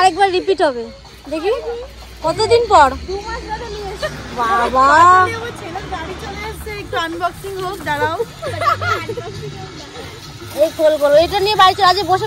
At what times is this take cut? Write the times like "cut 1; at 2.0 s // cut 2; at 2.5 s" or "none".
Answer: none

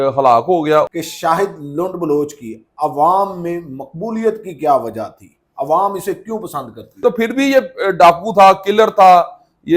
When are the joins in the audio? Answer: cut 1; at 0.9 s // cut 2; at 7.0 s

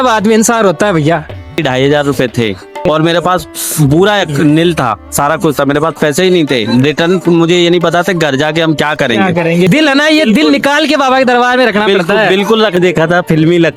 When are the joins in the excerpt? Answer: cut 1; at 1.6 s // cut 2; at 2.9 s // cut 3; at 9.7 s // cut 4; at 12.8 s

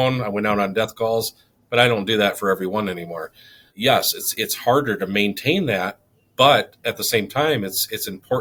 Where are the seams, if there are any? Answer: none

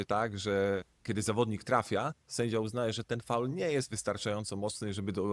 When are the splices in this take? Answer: none

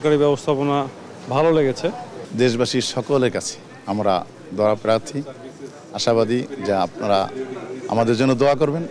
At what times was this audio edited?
none

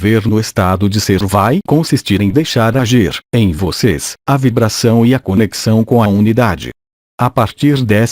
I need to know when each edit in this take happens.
cut 1; at 1.0 s

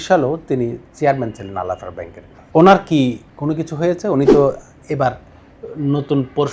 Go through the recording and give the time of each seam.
cut 1; at 2.4 s

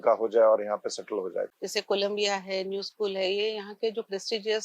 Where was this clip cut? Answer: cut 1; at 1.5 s

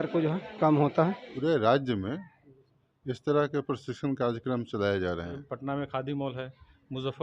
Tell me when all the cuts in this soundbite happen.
cut 1; at 1.2 s // cut 2; at 5.4 s

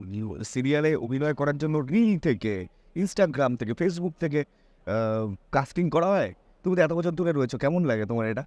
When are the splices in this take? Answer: none

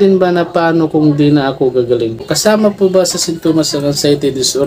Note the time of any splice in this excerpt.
cut 1; at 2.3 s

